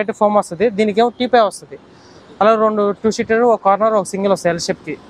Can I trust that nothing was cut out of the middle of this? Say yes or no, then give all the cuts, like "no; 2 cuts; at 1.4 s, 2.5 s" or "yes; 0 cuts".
yes; 0 cuts